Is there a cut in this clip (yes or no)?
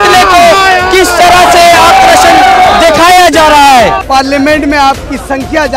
yes